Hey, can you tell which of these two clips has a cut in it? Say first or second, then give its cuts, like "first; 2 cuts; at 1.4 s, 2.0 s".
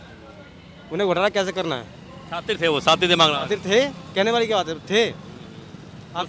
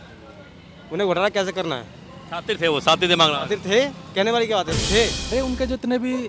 second; 1 cut; at 5.3 s